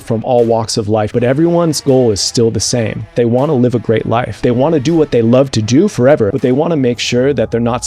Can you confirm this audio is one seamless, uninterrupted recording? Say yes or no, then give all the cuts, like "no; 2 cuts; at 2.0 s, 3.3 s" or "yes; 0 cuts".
no; 4 cuts; at 1.1 s, 3.1 s, 4.3 s, 6.3 s